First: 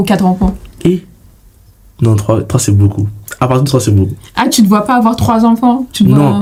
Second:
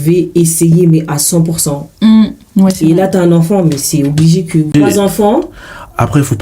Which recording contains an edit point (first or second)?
second